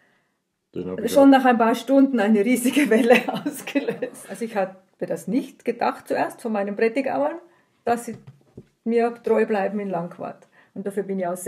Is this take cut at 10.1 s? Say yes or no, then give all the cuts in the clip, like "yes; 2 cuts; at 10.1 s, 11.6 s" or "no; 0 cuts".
no; 1 cut; at 4.2 s